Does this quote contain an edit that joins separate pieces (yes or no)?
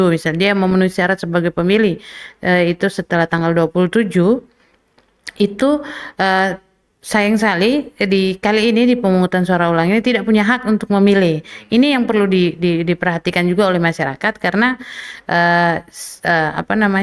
no